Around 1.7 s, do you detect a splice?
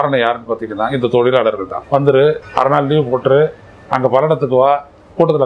yes; 2 cuts; at 1.7 s, 2.5 s

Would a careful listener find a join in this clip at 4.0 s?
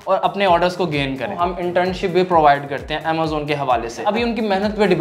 yes; 2 cuts; at 1.3 s, 4.0 s

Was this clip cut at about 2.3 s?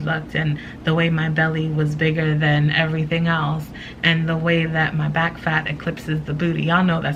no; 0 cuts

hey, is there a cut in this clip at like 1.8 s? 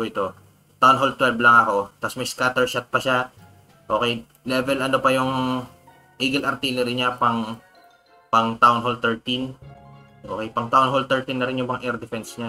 no; 0 cuts

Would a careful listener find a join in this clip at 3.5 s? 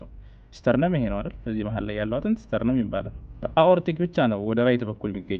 yes; 1 cut; at 3.5 s

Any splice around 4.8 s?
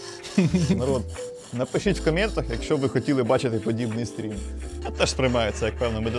yes; 1 cut; at 4.8 s

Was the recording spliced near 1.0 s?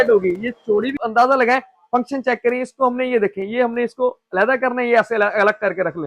yes; 1 cut; at 1.0 s

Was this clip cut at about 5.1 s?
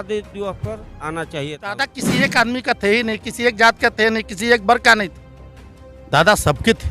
no; 1 cut; at 2.0 s

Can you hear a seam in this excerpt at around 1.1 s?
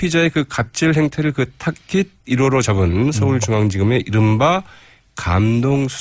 yes; 1 cut; at 1.1 s

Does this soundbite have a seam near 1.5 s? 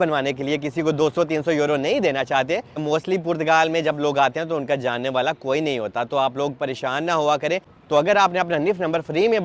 no; 2 cuts; at 2.8 s, 7.7 s

